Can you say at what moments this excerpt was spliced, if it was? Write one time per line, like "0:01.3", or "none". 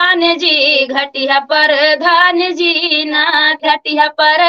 0:03.6